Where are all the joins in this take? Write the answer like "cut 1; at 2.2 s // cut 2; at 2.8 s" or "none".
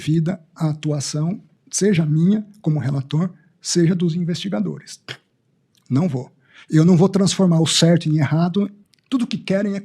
cut 1; at 8.8 s